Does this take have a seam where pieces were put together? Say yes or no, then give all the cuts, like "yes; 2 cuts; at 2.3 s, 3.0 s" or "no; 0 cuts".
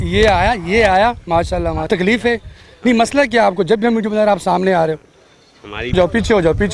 yes; 2 cuts; at 1.9 s, 5.9 s